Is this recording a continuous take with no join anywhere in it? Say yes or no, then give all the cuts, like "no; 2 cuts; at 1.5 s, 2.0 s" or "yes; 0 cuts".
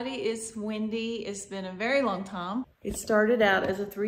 no; 1 cut; at 2.7 s